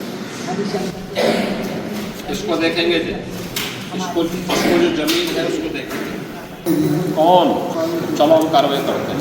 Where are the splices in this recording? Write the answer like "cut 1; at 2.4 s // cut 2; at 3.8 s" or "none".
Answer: cut 1; at 6.6 s // cut 2; at 7.7 s